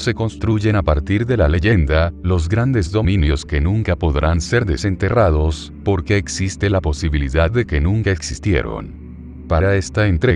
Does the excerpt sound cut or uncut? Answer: cut